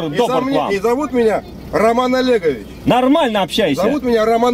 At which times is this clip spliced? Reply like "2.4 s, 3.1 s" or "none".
none

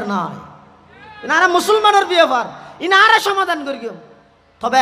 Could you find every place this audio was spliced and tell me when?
none

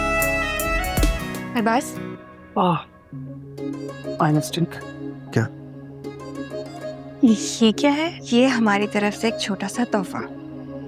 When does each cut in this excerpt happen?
1.1 s

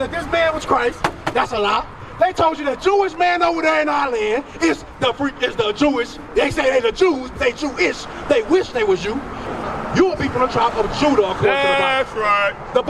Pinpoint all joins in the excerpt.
9.4 s

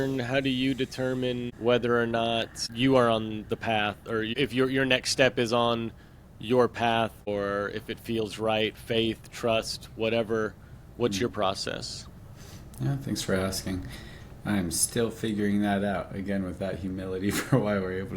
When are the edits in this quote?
1.5 s, 2.6 s, 4.3 s, 7.3 s

